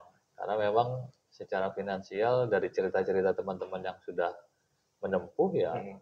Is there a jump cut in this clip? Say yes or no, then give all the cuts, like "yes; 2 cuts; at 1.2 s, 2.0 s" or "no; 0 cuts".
no; 0 cuts